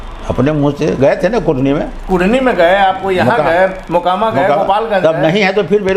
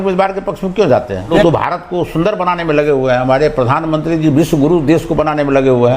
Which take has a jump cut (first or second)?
second